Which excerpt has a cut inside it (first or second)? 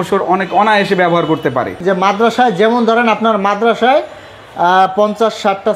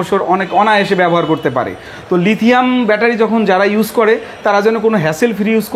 first